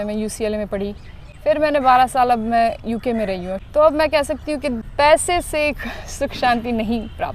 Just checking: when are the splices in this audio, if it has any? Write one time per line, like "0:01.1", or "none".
0:03.5
0:04.8